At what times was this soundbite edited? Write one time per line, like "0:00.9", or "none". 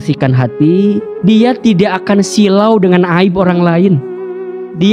0:01.1

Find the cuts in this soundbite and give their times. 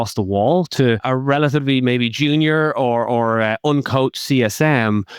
0:01.0

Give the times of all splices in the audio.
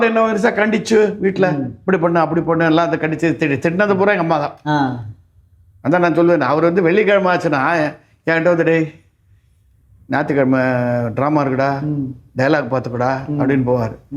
none

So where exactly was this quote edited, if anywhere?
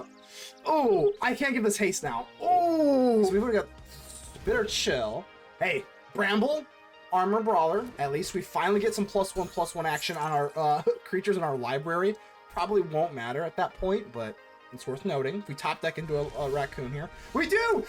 0:03.3
0:06.0

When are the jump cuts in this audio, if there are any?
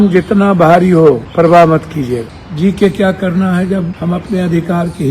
0:01.3
0:02.4
0:03.9

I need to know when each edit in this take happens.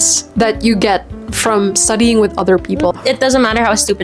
0:02.9

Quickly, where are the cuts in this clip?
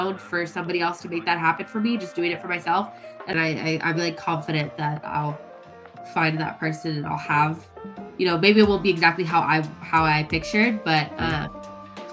0:03.3

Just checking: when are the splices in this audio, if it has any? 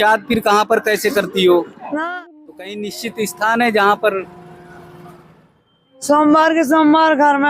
0:02.1

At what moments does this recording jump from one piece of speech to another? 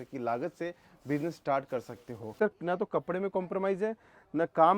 0:02.3

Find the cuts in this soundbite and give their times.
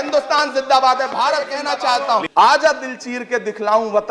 0:01.8

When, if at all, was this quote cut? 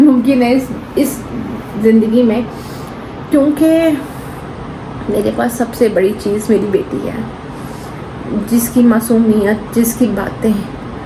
none

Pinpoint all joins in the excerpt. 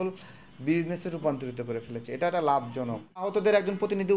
0:03.3

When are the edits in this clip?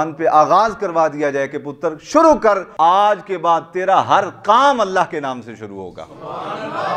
0:02.7

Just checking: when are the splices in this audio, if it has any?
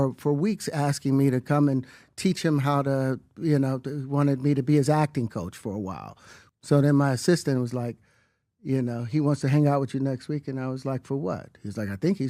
0:06.5

